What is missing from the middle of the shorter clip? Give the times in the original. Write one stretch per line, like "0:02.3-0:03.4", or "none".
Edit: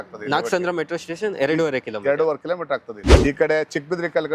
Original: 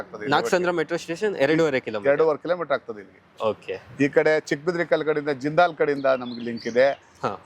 0:03.0-0:03.8